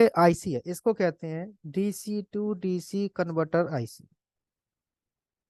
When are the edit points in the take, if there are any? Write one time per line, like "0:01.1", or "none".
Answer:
none